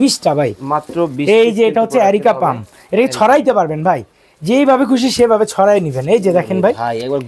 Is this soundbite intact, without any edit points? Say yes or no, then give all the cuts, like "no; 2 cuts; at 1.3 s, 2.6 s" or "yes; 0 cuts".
yes; 0 cuts